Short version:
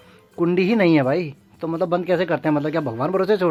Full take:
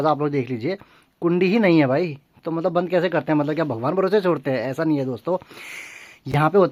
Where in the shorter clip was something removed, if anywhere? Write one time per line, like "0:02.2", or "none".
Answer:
none